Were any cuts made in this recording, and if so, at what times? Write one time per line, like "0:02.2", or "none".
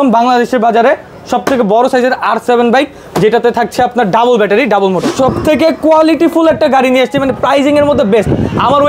0:05.1